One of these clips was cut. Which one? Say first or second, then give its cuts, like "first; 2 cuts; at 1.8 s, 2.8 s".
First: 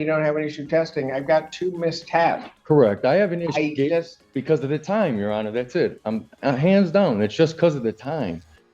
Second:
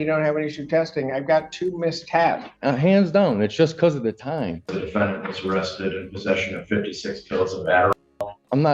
second; 3 cuts; at 2.5 s, 4.8 s, 8.0 s